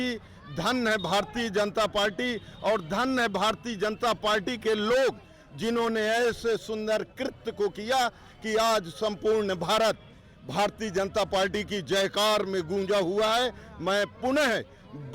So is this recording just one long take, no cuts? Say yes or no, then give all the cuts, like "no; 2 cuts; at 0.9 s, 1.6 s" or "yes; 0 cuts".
yes; 0 cuts